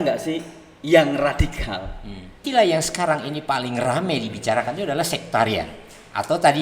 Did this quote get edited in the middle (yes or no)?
yes